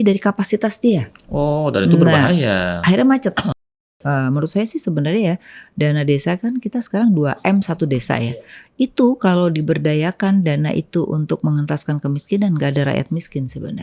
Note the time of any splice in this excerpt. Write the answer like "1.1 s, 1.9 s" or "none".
3.7 s